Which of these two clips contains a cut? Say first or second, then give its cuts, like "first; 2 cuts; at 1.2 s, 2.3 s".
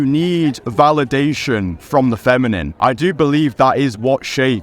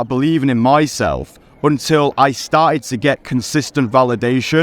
first; 1 cut; at 2.7 s